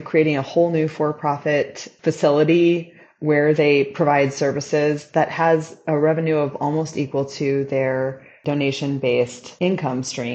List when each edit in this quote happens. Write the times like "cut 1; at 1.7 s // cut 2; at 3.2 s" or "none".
cut 1; at 1.8 s // cut 2; at 8.4 s // cut 3; at 9.4 s